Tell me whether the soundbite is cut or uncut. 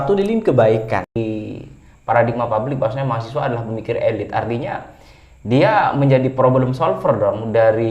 cut